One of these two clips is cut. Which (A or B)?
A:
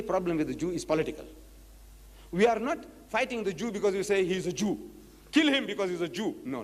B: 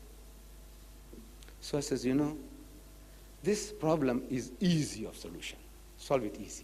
A